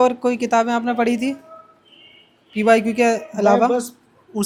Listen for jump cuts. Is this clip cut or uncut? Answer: uncut